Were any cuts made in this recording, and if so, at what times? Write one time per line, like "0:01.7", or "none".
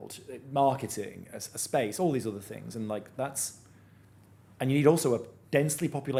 none